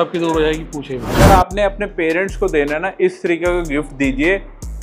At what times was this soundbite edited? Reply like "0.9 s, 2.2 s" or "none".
1.2 s